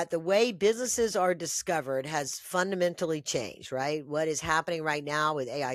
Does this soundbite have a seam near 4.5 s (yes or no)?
no